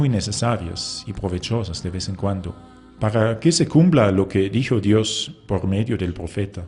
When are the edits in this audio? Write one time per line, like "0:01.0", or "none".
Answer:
0:02.9